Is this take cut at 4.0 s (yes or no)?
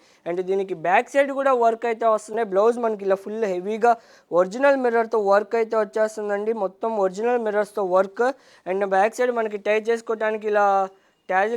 no